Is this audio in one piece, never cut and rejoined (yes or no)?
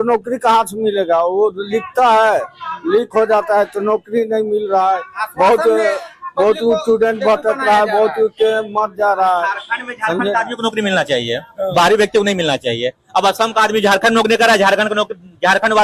yes